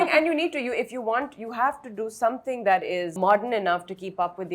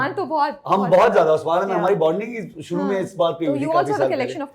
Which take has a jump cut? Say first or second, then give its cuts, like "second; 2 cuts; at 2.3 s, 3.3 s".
first; 1 cut; at 3.1 s